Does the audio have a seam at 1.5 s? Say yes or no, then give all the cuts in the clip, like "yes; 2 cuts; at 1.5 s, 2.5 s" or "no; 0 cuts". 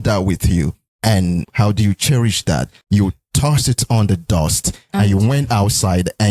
yes; 2 cuts; at 1.5 s, 2.7 s